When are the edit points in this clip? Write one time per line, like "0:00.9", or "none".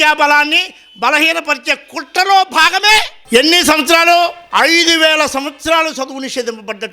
0:03.1
0:04.4